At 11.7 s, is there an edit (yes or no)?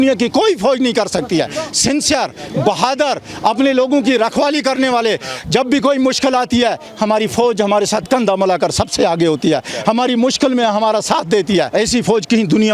yes